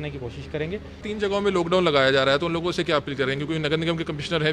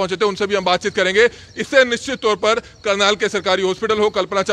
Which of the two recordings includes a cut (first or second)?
first